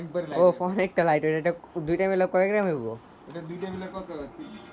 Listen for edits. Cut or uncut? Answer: uncut